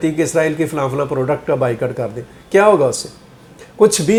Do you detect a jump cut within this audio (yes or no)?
no